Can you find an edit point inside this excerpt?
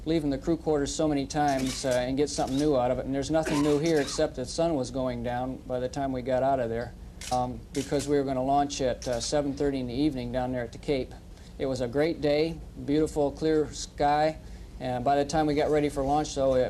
no; 0 cuts

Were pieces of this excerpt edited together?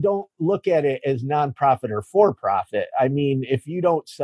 no; 0 cuts

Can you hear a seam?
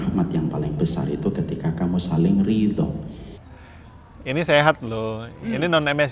yes; 1 cut; at 3.6 s

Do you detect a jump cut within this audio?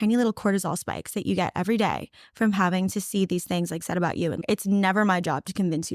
yes; 1 cut; at 4.4 s

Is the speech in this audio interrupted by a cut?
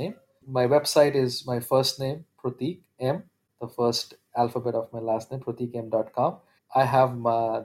yes; 1 cut; at 6.5 s

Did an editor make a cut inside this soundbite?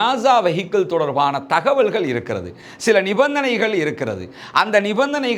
no; 0 cuts

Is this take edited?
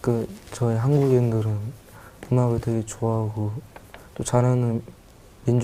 no; 0 cuts

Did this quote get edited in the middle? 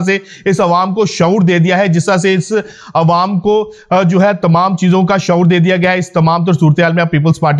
no; 0 cuts

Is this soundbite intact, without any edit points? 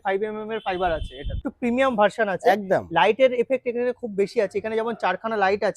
no; 1 cut; at 1.4 s

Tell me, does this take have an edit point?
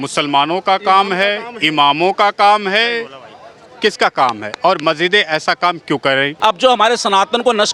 yes; 1 cut; at 6.3 s

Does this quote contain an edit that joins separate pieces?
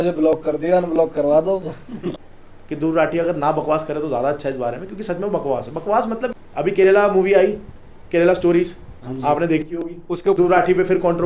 yes; 3 cuts; at 2.1 s, 6.3 s, 10.4 s

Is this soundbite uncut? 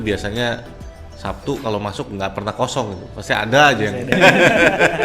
no; 1 cut; at 4.1 s

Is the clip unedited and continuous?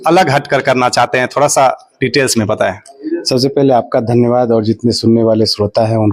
yes; 0 cuts

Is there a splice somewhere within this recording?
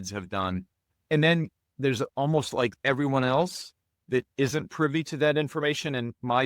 yes; 3 cuts; at 1.0 s, 1.6 s, 2.8 s

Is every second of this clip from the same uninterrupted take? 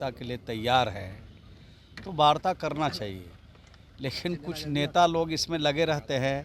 yes; 0 cuts

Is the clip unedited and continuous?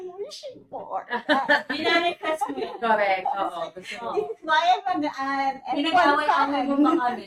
yes; 0 cuts

